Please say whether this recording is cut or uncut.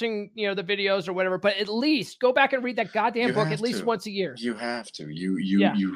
uncut